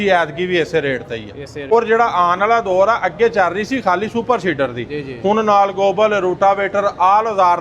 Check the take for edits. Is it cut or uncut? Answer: cut